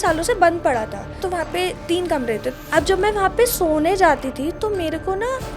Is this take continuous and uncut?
no; 2 cuts; at 1.2 s, 2.5 s

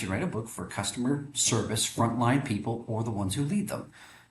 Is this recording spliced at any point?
no; 0 cuts

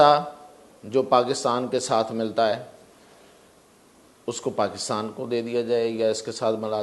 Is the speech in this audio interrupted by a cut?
no; 0 cuts

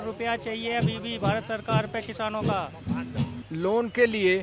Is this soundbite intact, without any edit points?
no; 1 cut; at 3.4 s

